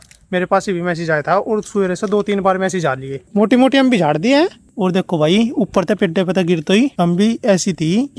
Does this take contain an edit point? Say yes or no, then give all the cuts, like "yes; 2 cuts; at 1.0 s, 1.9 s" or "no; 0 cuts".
yes; 2 cuts; at 3.1 s, 6.9 s